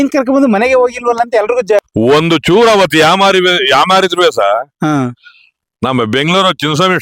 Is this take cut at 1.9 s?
yes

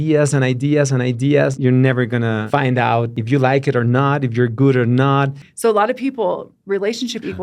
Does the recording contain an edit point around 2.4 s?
yes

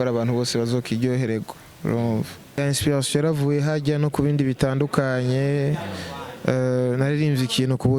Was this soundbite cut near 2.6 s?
yes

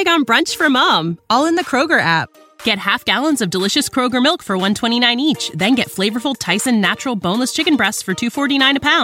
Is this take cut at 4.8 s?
no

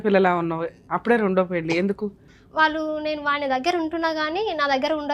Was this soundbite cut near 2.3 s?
yes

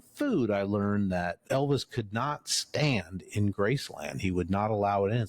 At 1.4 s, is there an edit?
yes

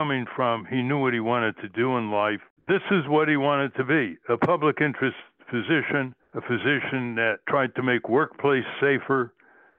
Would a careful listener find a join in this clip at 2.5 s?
yes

